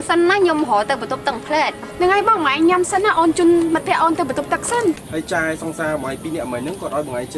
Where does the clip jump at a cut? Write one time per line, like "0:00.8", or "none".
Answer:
0:05.0